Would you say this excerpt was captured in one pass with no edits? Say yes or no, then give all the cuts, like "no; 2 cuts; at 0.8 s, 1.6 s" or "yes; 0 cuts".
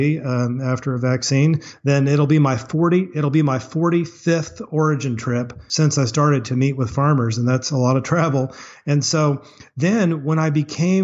no; 1 cut; at 5.6 s